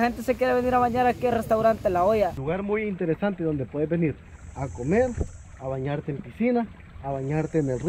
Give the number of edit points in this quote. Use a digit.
1